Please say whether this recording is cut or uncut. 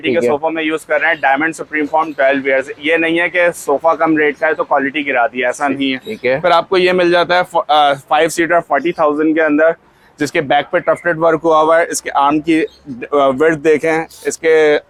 uncut